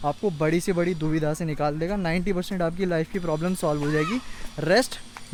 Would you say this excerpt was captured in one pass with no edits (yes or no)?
yes